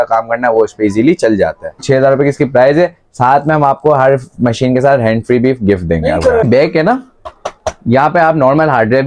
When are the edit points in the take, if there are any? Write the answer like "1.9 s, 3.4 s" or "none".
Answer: 1.8 s, 6.4 s